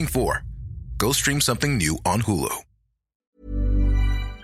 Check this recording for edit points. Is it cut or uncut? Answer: cut